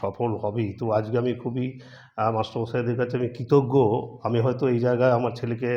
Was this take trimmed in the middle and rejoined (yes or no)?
no